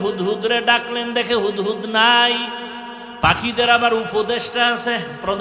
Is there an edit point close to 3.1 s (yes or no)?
yes